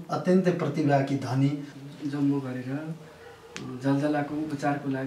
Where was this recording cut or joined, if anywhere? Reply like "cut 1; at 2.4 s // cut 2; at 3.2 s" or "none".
cut 1; at 1.7 s